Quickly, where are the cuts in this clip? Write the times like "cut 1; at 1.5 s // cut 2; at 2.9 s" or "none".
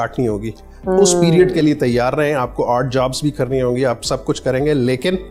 none